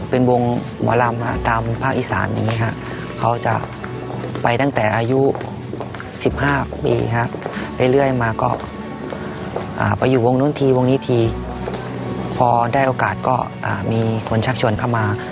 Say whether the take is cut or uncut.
uncut